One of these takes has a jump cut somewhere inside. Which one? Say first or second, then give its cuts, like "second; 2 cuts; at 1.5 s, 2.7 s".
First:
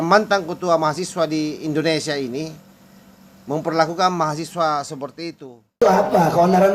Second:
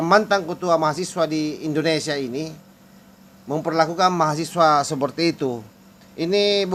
first; 1 cut; at 5.8 s